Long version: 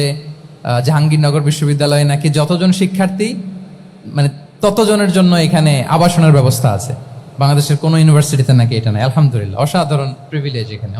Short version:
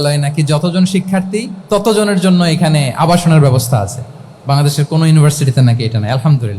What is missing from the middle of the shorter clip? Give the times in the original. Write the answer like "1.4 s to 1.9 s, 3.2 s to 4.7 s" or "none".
3.4 s to 4.5 s